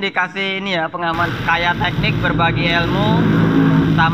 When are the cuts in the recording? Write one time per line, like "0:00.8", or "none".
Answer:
0:01.3